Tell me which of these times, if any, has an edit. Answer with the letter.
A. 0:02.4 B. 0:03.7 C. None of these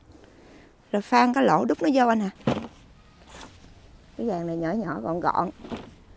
A